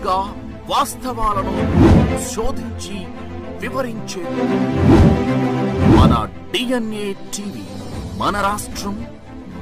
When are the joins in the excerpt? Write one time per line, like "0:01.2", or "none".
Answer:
none